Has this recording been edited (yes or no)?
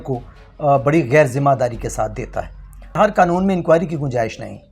yes